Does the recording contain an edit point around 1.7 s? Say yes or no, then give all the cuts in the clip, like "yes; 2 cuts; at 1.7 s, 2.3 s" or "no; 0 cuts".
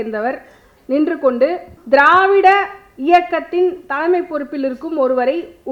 yes; 1 cut; at 1.7 s